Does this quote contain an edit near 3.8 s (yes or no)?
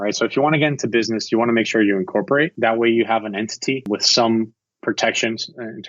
yes